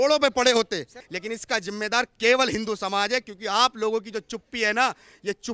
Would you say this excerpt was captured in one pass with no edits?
no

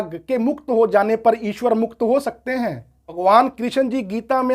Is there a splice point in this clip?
yes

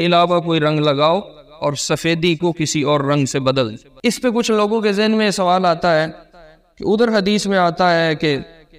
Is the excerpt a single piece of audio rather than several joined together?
no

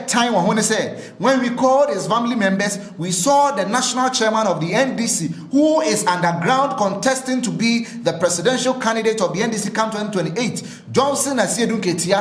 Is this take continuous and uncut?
yes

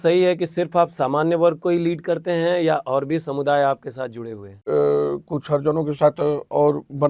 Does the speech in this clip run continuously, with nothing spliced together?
no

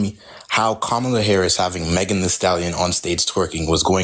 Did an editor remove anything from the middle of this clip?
no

